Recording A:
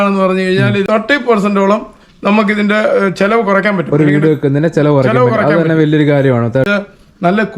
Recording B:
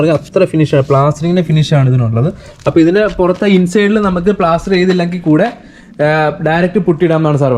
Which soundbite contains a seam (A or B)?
A